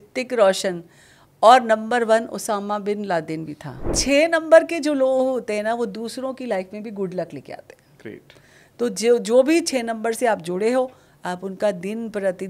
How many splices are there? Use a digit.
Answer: 1